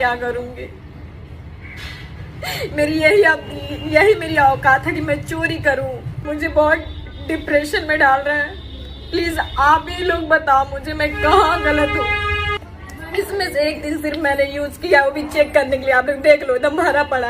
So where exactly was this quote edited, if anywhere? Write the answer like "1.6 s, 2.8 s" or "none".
6.1 s, 12.6 s

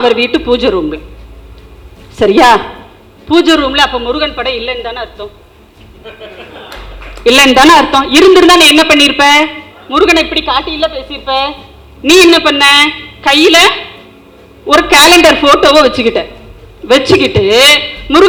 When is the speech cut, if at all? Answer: none

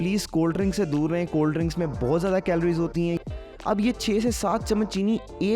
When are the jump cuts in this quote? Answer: 3.2 s

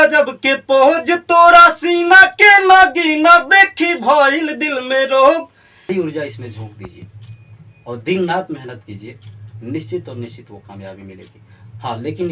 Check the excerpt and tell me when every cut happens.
5.9 s

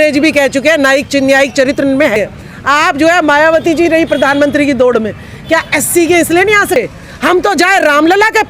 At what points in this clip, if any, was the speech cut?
2.2 s, 6.8 s

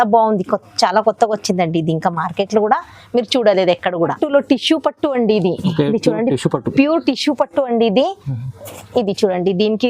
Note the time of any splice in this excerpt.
4.0 s

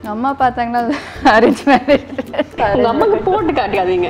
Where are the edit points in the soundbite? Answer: 2.6 s

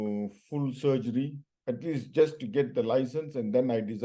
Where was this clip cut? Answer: 1.5 s

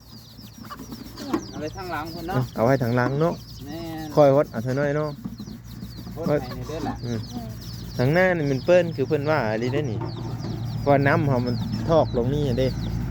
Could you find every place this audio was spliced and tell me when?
none

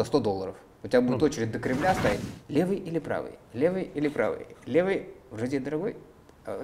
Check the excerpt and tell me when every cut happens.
2.2 s

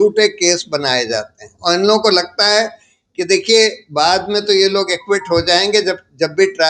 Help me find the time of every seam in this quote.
none

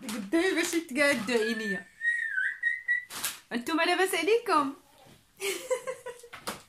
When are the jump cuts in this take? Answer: 3.2 s

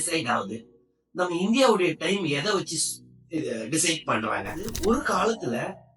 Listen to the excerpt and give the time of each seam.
4.7 s

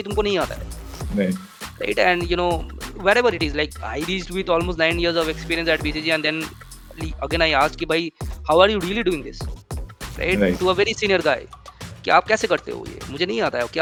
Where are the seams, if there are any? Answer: none

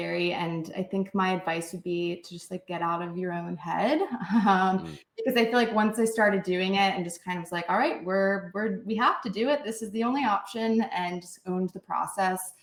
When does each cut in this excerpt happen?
none

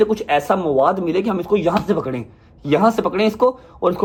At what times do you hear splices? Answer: none

